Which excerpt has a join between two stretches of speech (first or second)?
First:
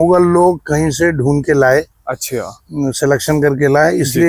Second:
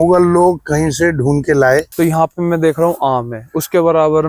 second